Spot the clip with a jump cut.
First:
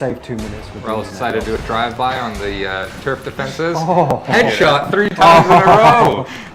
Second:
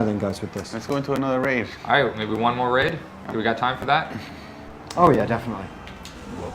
second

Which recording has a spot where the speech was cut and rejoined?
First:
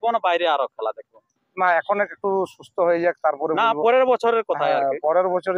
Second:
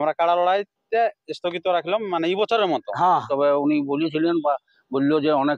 second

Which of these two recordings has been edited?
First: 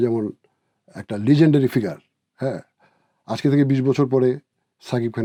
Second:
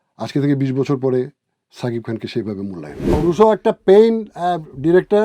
second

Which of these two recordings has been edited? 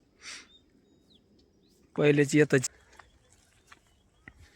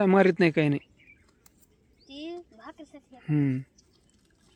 first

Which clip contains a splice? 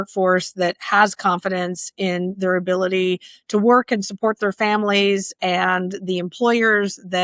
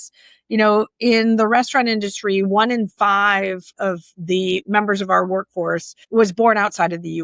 second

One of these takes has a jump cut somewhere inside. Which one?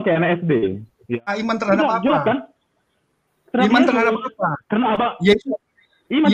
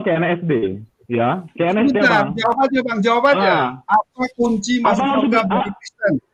first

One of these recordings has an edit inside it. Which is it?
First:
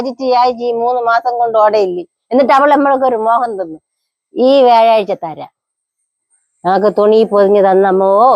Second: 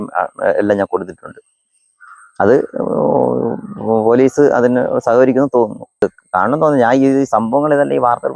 second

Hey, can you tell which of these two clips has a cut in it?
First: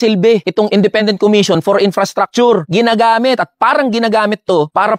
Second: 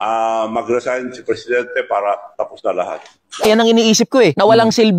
second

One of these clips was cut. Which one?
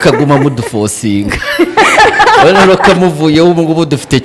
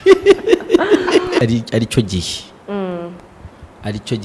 second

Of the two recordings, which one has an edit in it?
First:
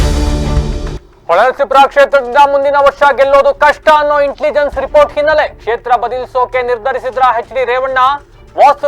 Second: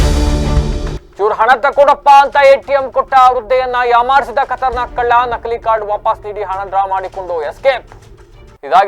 first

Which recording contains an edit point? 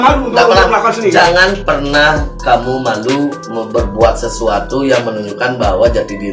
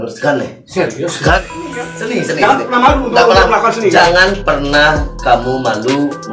second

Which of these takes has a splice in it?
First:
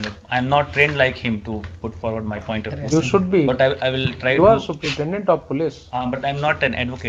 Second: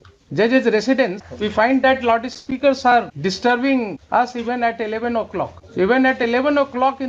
second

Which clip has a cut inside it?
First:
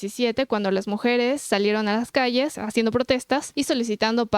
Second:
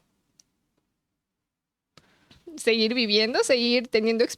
first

